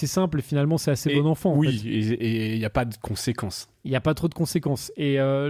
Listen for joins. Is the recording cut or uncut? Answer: uncut